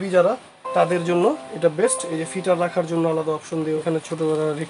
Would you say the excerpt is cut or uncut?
cut